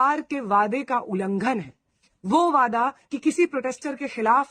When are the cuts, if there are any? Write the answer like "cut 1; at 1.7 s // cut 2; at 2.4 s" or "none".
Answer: none